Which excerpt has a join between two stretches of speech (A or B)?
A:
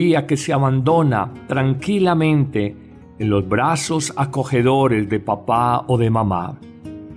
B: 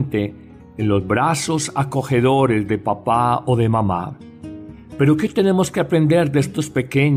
A